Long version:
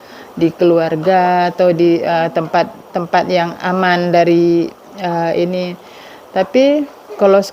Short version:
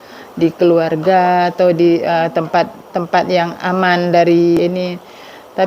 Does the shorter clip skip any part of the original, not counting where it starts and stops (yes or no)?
yes